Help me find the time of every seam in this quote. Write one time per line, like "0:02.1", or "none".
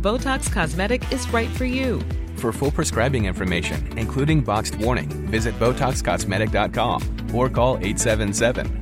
none